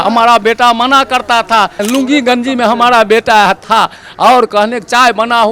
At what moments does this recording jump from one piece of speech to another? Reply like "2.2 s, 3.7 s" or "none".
1.8 s